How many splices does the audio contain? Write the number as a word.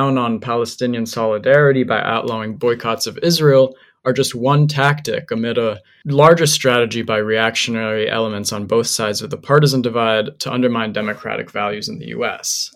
zero